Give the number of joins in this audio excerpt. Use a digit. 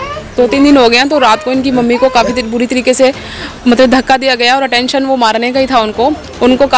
0